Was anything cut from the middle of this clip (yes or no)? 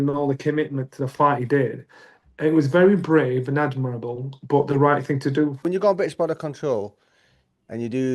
yes